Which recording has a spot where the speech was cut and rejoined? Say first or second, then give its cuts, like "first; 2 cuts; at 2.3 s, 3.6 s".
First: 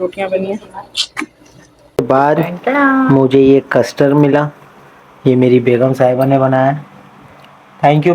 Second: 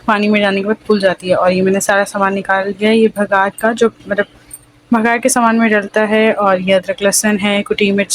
first; 1 cut; at 2.0 s